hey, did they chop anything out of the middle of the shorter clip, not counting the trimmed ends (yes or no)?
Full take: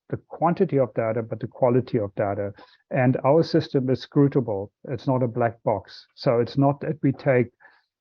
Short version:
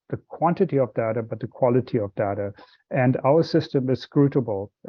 no